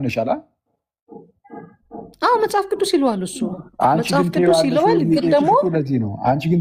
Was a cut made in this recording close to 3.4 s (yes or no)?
no